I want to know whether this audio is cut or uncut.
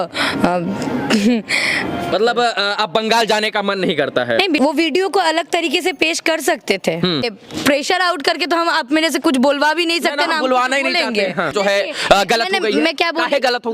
cut